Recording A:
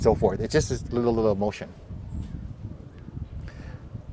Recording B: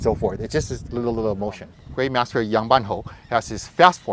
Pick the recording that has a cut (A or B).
B